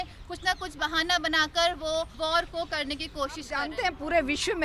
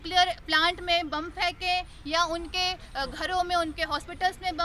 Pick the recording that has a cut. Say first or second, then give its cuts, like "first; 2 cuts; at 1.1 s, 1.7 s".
first; 2 cuts; at 2.1 s, 3.6 s